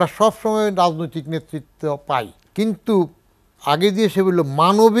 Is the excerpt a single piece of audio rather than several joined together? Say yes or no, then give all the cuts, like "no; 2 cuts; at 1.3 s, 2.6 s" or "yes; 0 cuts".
no; 1 cut; at 2.4 s